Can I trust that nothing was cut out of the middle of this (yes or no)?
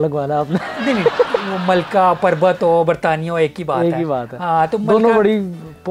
yes